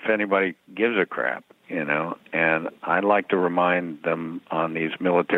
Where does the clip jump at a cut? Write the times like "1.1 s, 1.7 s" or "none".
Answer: 2.7 s

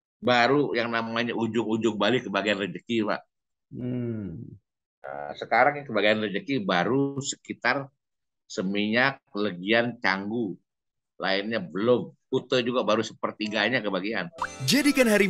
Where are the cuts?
14.4 s

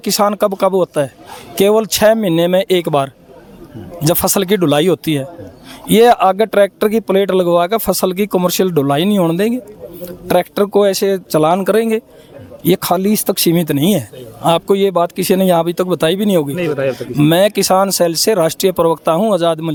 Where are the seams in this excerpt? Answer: none

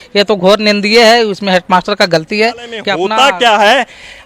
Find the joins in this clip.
2.9 s

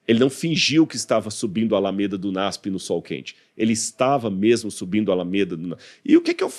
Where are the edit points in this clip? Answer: none

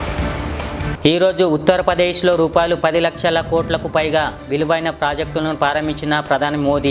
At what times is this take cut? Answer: none

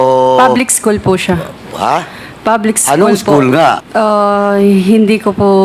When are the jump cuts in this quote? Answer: 3.8 s

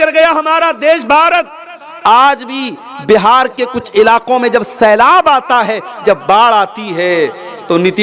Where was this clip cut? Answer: none

